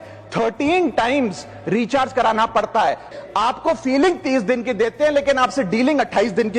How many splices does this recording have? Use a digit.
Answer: 1